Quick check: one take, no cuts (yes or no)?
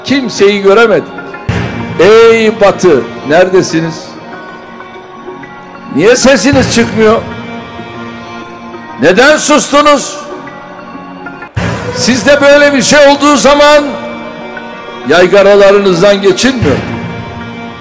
yes